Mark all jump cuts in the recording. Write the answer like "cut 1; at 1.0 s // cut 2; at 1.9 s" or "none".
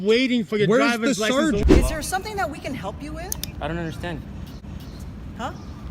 cut 1; at 1.6 s